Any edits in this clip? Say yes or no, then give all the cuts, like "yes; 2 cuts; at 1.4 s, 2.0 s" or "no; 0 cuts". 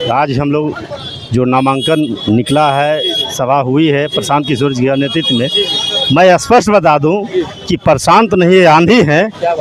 no; 0 cuts